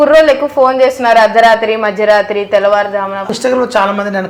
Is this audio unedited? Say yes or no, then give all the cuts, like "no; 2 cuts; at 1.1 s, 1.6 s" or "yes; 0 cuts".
no; 1 cut; at 3.3 s